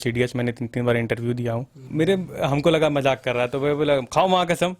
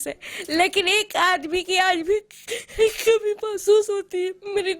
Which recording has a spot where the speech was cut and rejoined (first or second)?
first